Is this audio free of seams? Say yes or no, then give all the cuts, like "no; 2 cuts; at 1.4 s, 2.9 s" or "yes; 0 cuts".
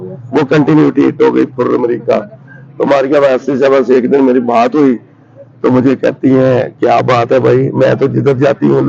yes; 0 cuts